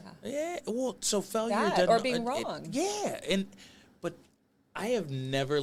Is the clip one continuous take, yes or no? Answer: yes